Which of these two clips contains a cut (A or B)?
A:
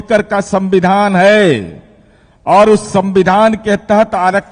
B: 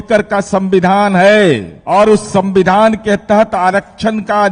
B